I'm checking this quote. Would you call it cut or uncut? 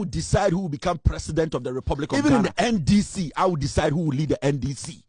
cut